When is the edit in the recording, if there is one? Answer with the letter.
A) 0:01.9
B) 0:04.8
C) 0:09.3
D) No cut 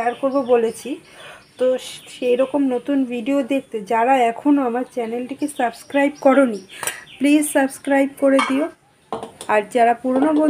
D